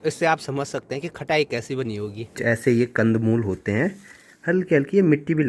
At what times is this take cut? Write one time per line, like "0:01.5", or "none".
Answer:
0:02.4